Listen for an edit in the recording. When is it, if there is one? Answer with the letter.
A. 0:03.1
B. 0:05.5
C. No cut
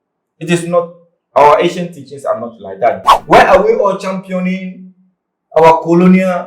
A